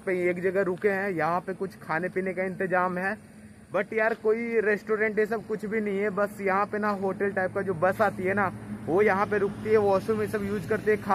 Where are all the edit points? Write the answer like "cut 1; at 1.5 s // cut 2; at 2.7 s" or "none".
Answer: none